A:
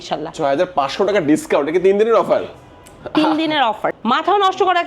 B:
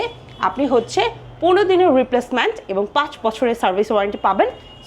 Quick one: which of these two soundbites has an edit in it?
A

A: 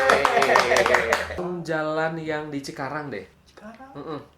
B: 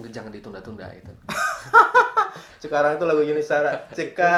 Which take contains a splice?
A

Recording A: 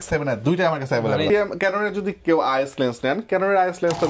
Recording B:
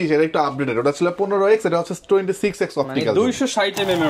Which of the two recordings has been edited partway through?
A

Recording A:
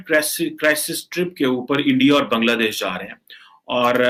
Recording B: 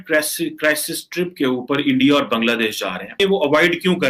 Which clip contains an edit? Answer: B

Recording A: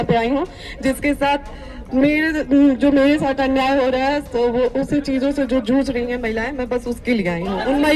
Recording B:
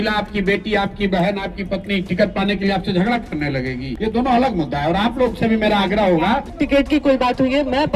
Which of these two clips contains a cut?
B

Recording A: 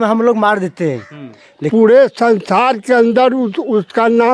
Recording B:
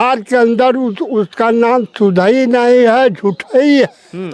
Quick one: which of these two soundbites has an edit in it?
A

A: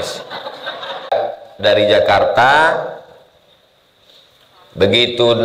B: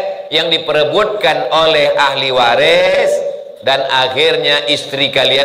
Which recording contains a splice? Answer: A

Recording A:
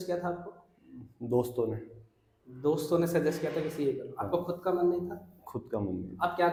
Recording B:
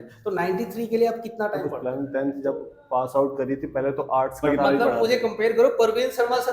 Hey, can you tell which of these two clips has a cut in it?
B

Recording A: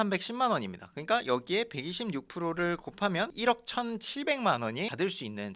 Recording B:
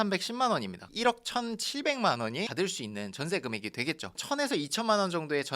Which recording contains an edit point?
B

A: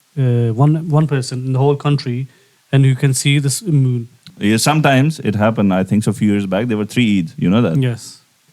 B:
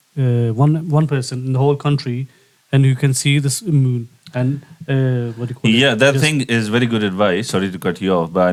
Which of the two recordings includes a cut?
A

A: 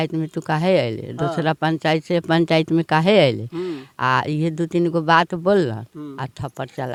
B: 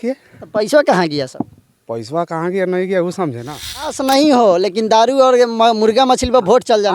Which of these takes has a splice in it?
B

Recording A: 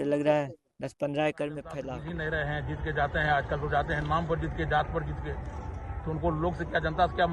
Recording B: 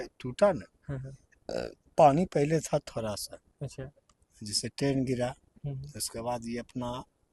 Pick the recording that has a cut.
A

